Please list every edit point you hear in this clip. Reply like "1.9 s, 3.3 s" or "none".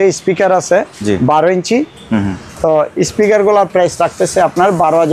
none